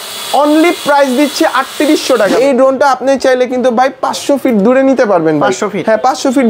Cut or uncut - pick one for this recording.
cut